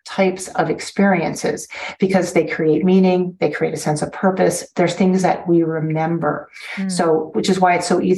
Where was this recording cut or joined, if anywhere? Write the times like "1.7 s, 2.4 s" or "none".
none